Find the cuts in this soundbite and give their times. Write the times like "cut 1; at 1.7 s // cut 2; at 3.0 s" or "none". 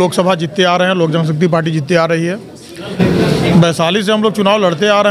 cut 1; at 2.9 s